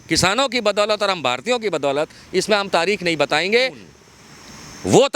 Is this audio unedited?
no; 1 cut; at 3.9 s

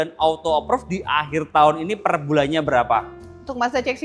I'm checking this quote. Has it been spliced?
no; 0 cuts

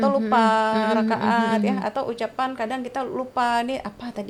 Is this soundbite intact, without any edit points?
yes; 0 cuts

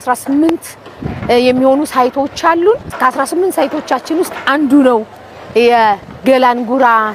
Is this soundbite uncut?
yes; 0 cuts

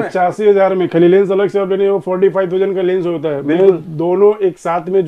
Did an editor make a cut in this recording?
no; 0 cuts

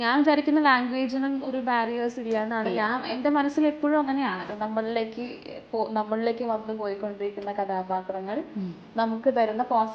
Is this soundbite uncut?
no; 1 cut; at 4.5 s

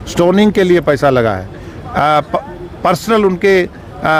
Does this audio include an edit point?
no; 0 cuts

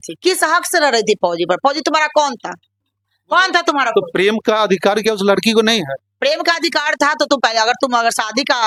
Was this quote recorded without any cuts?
yes; 0 cuts

